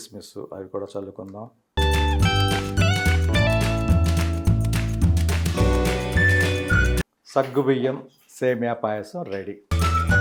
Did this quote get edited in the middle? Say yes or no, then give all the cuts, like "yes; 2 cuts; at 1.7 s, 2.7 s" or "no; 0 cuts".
no; 0 cuts